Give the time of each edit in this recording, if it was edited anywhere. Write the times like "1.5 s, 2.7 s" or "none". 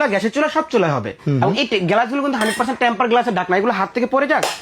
1.1 s